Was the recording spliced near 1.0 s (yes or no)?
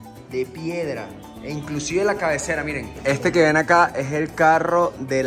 no